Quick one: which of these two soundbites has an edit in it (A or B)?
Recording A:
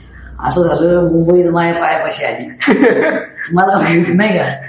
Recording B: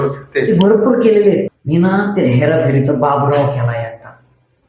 B